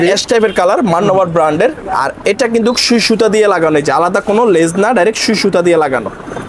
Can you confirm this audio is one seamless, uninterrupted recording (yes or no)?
yes